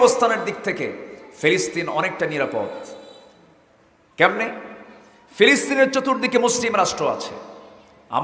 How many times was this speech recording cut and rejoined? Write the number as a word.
zero